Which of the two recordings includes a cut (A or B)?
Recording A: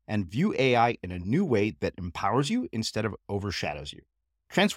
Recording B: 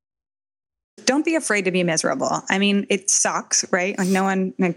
B